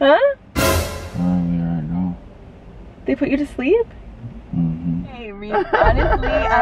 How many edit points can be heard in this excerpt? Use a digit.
1